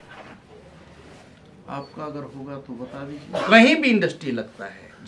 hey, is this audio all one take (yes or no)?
no